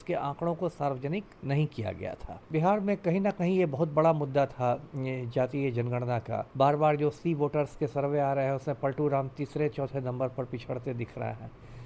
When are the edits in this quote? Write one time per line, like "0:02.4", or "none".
0:01.3
0:02.5
0:06.5